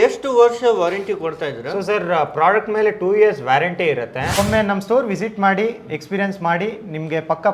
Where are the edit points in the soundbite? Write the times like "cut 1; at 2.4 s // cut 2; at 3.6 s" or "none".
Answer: cut 1; at 4.2 s